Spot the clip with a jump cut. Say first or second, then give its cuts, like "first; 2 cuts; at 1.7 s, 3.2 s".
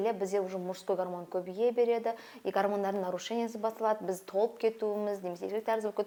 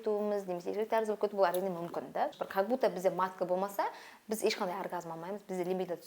second; 1 cut; at 2.4 s